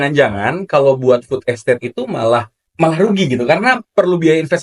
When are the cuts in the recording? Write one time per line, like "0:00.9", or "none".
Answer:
0:02.6